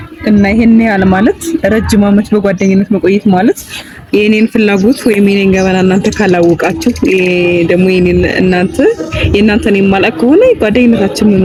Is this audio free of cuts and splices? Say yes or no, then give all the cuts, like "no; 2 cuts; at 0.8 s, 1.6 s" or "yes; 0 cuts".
yes; 0 cuts